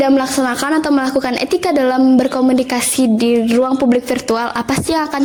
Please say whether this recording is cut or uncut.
uncut